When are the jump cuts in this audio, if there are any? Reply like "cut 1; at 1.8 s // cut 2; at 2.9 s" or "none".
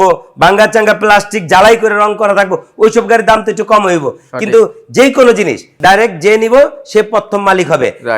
cut 1; at 5.7 s